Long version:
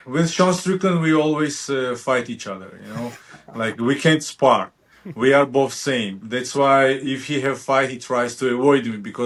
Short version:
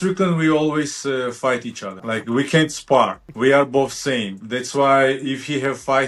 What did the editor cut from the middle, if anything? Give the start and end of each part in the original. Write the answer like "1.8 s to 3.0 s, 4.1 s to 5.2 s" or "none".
2.5 s to 3.4 s, 4.8 s to 5.0 s